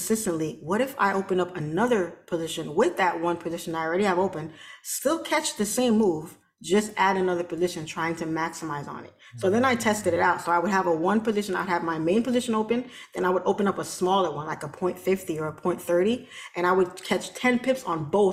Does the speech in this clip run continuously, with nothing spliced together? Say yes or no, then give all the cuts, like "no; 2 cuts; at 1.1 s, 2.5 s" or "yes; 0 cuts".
yes; 0 cuts